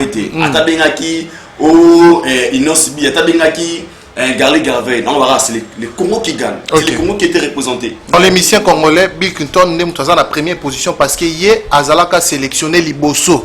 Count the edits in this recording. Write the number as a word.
one